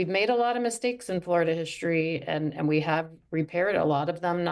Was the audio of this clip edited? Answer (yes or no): no